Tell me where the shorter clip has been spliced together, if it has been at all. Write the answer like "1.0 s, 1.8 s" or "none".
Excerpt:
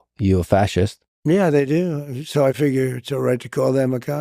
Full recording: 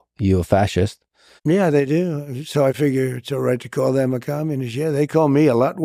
1.1 s